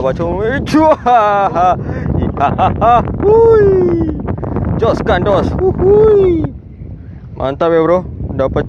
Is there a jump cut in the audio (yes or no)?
no